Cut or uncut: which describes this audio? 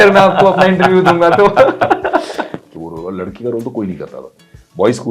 cut